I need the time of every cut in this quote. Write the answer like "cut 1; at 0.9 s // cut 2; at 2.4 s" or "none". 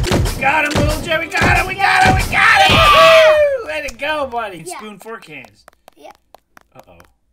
cut 1; at 4.6 s